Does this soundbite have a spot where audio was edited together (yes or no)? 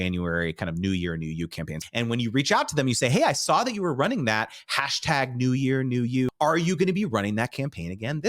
yes